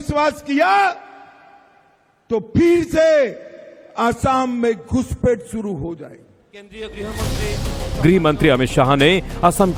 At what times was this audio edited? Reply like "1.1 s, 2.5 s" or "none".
none